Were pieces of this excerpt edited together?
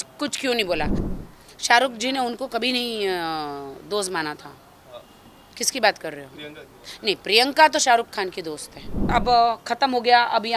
yes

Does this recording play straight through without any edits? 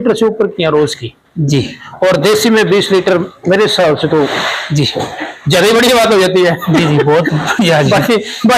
yes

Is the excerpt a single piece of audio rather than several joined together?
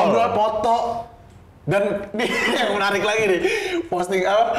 yes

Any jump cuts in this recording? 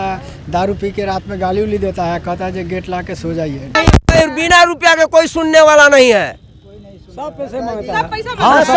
yes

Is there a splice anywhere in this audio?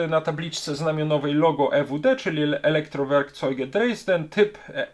no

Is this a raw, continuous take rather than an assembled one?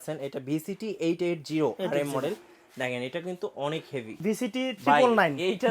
no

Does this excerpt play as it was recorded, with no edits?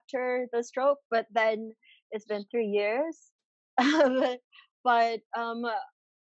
yes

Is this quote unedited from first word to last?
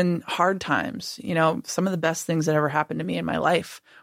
yes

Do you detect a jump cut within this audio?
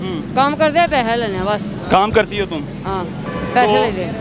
yes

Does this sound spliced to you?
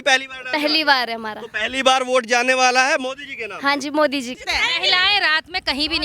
yes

